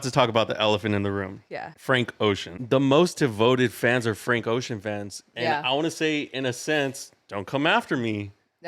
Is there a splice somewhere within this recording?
yes; 2 cuts; at 1.7 s, 2.6 s

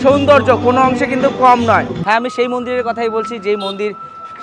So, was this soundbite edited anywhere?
yes; 1 cut; at 1.9 s

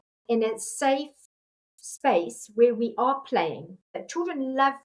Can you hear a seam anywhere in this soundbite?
yes; 1 cut; at 3.8 s

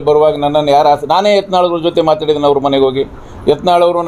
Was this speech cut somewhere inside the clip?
no; 0 cuts

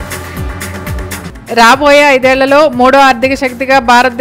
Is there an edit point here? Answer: yes; 1 cut; at 1.2 s

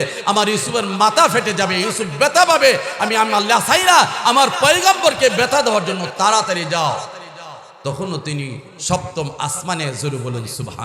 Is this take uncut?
yes; 0 cuts

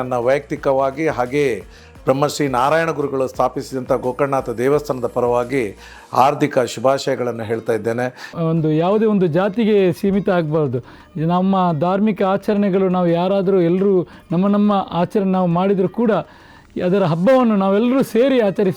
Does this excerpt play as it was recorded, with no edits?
no; 1 cut; at 8.2 s

